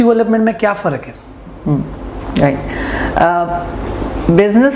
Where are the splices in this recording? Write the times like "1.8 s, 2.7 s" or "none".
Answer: none

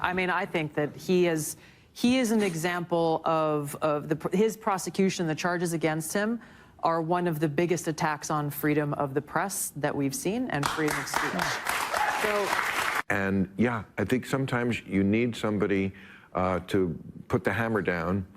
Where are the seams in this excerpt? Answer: 12.7 s

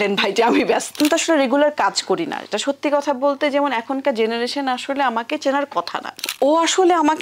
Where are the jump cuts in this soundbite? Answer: 1.0 s, 6.2 s

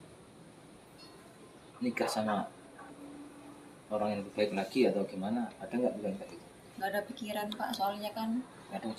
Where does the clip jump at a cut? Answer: none

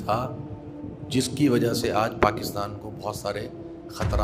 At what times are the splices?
none

